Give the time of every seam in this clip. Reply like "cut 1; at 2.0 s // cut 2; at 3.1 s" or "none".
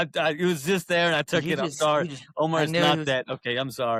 none